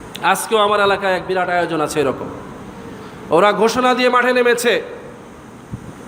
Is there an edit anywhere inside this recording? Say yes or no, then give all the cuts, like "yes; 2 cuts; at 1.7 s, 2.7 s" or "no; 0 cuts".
no; 0 cuts